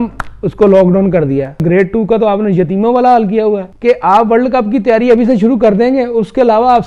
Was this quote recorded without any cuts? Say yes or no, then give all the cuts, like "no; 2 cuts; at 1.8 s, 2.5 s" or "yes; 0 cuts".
no; 2 cuts; at 1.6 s, 3.7 s